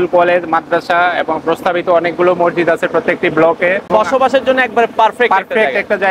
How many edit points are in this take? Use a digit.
1